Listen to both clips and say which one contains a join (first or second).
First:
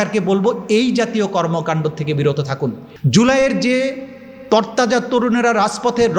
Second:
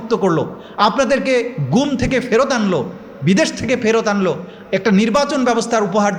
first